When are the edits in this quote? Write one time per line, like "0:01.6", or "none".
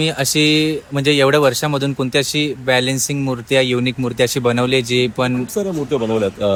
none